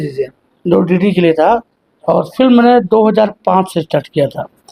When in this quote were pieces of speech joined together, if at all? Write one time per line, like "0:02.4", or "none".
none